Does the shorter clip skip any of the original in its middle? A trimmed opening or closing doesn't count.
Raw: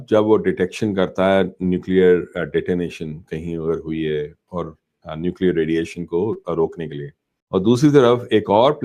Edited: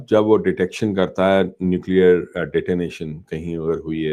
no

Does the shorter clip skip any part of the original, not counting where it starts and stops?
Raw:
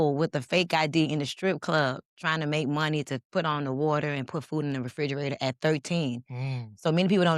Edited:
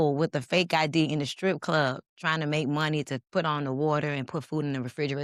no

